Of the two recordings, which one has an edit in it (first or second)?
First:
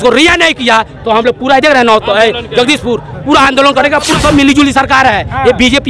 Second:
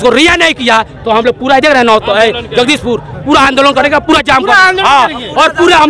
first